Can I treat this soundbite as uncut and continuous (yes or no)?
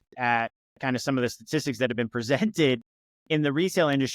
yes